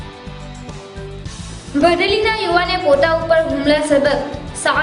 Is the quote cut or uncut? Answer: uncut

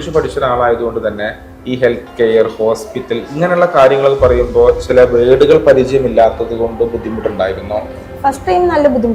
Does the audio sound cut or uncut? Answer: uncut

